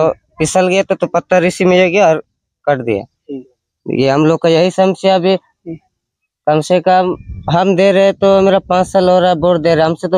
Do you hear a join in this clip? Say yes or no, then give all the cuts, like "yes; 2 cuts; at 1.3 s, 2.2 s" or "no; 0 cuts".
no; 0 cuts